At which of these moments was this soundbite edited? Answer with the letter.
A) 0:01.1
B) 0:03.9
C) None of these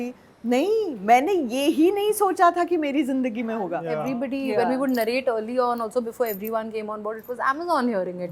B